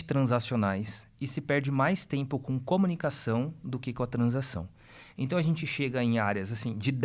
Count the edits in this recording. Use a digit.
0